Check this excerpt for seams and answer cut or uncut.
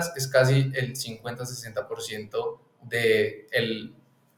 uncut